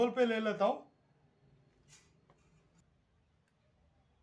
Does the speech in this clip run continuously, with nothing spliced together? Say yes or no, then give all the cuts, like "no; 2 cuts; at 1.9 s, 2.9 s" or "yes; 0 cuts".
no; 1 cut; at 2.8 s